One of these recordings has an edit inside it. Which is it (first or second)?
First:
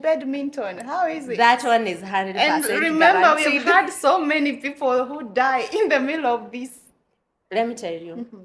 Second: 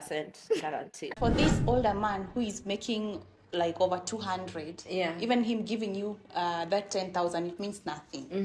second